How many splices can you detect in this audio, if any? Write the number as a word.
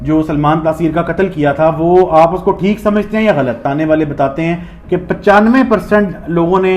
one